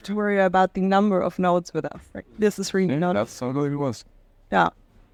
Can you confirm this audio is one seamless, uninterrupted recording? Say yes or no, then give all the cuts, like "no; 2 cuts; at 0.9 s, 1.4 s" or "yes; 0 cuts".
yes; 0 cuts